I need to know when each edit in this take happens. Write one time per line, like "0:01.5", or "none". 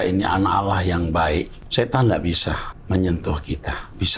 0:01.6
0:02.7